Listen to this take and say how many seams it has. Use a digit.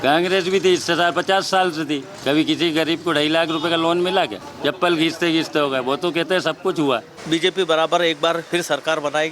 3